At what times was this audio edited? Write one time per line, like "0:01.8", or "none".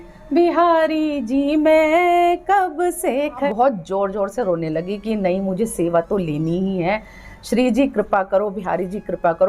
0:03.5